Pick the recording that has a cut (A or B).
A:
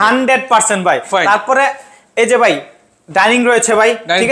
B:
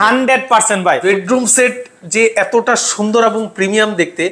B